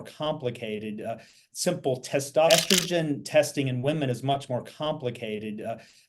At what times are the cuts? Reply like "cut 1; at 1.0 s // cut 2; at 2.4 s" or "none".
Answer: cut 1; at 2.5 s

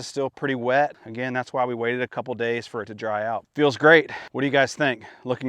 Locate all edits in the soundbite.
cut 1; at 1.1 s // cut 2; at 3.5 s // cut 3; at 4.2 s

